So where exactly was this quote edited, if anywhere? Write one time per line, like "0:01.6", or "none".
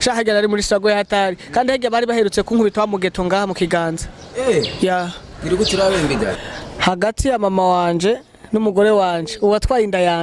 0:06.4